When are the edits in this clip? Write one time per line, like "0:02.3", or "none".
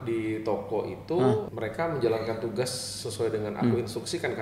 0:01.5

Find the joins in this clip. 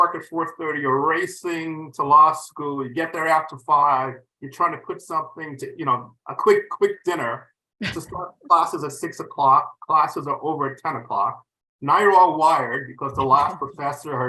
none

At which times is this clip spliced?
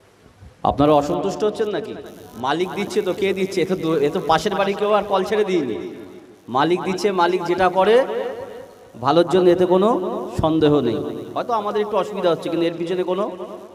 none

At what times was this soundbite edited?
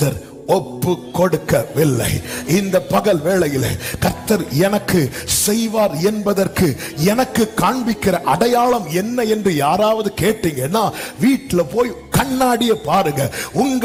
none

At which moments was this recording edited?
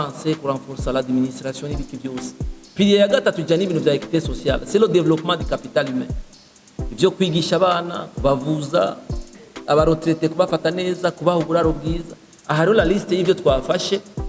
none

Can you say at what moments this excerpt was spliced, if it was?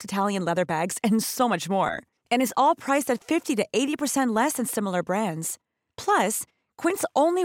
none

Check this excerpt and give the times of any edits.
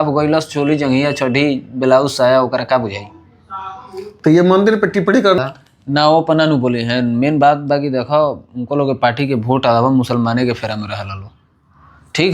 0:05.4

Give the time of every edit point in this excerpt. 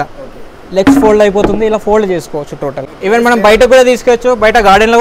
none

